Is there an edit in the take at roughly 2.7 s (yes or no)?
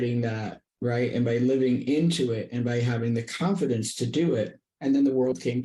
no